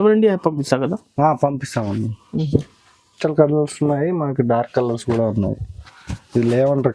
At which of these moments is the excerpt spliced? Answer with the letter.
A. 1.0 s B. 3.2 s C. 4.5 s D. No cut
B